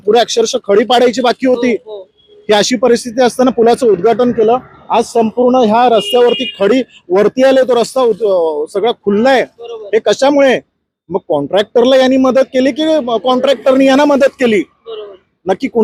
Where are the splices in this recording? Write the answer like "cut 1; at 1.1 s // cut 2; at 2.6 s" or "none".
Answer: none